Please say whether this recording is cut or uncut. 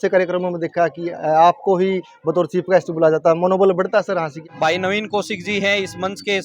cut